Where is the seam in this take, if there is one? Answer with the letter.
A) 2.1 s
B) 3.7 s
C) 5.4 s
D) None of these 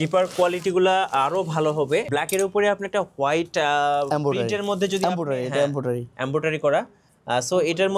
A